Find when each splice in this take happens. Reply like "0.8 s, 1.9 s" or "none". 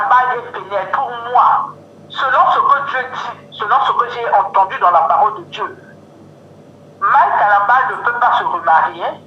none